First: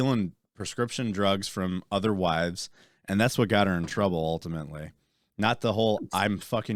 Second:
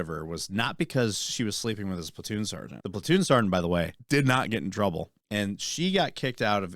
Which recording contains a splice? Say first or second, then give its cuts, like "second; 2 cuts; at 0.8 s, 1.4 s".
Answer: second; 3 cuts; at 2.7 s, 4.0 s, 5.1 s